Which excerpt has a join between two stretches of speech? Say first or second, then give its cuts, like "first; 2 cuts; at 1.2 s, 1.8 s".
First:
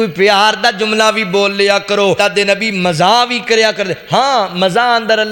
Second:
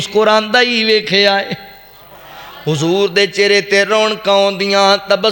first; 1 cut; at 2.2 s